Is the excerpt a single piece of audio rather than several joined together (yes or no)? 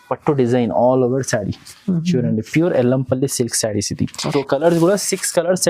no